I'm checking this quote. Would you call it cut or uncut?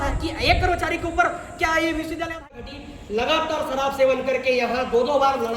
cut